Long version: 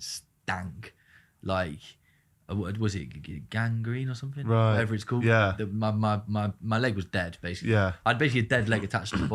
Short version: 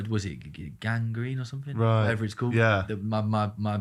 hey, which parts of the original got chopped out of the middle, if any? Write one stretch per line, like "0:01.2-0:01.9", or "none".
none